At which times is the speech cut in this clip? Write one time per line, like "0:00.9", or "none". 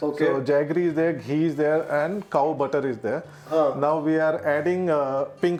none